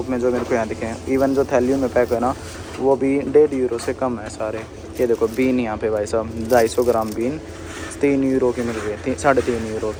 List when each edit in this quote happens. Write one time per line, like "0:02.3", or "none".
none